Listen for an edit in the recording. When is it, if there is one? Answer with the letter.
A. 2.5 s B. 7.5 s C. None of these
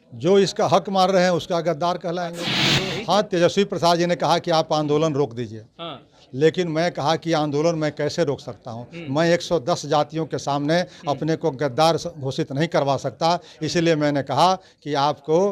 A